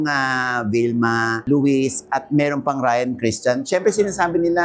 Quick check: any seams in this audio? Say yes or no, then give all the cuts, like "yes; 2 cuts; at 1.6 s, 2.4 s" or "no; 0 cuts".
no; 0 cuts